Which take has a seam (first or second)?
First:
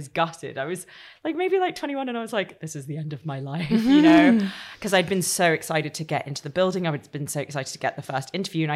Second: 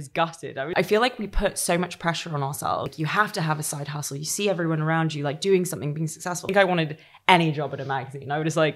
second